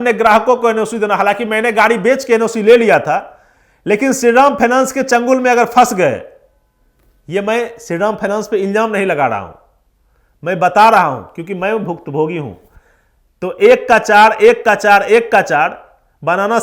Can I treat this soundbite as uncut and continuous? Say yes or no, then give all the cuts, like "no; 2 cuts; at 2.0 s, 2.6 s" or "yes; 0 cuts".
yes; 0 cuts